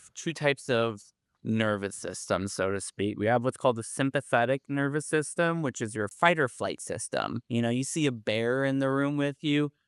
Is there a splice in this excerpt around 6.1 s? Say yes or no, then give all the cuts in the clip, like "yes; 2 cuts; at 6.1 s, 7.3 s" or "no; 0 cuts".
yes; 1 cut; at 6.1 s